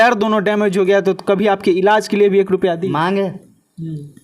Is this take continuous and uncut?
yes; 0 cuts

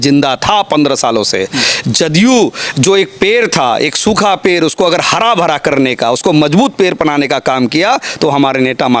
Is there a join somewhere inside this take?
no; 0 cuts

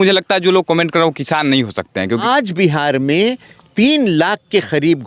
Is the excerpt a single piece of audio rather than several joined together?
no; 1 cut; at 2.2 s

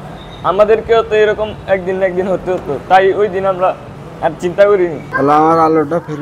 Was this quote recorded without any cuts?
no; 1 cut; at 5.0 s

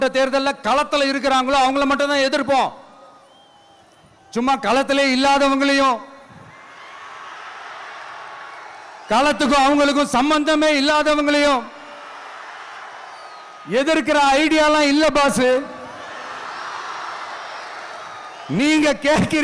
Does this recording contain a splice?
no; 0 cuts

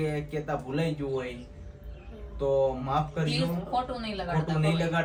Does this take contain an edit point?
no; 0 cuts

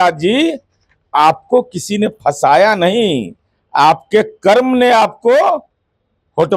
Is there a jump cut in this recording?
no; 0 cuts

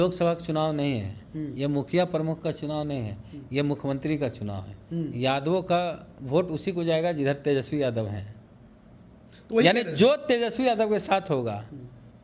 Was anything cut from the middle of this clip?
no; 0 cuts

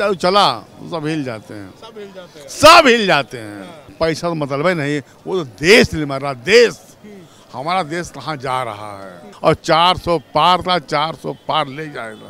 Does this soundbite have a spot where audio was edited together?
yes; 2 cuts; at 3.9 s, 9.2 s

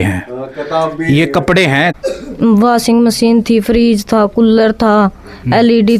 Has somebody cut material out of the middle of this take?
yes; 1 cut; at 1.9 s

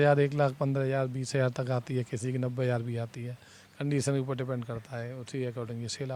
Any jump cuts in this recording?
no; 0 cuts

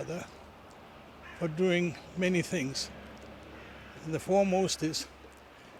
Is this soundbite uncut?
yes; 0 cuts

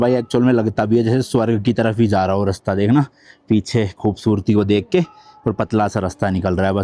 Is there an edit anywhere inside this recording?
no; 0 cuts

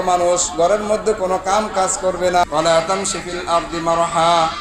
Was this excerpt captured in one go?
no; 1 cut; at 2.4 s

